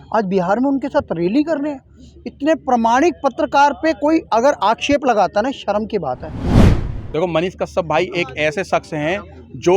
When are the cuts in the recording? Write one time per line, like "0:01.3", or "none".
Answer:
0:06.6